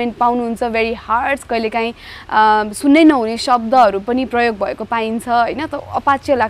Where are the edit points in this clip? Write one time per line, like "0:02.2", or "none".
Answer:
none